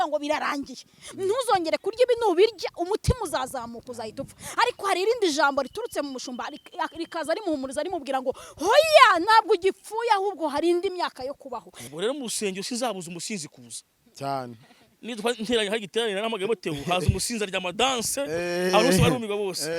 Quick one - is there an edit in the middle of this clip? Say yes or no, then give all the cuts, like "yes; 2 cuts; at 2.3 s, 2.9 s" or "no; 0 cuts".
yes; 1 cut; at 11.8 s